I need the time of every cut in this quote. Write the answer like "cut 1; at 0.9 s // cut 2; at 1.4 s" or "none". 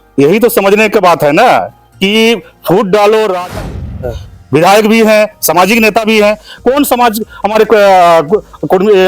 cut 1; at 3.6 s